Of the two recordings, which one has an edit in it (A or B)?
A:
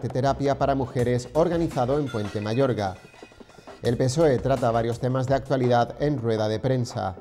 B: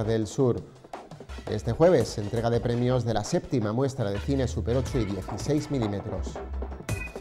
B